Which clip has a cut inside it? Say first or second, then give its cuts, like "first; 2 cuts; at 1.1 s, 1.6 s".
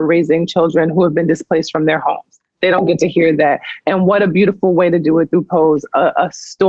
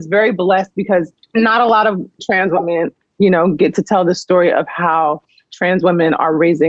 second; 2 cuts; at 1.2 s, 3.0 s